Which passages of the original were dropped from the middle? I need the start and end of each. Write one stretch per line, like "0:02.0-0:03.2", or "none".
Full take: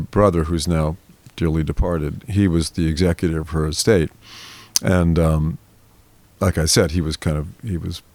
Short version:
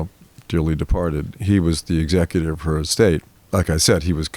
0:04.2-0:06.2